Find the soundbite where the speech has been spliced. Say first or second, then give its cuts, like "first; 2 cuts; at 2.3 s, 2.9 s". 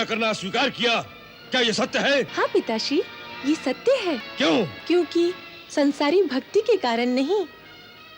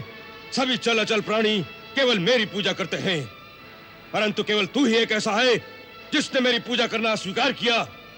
first; 2 cuts; at 2.3 s, 4.3 s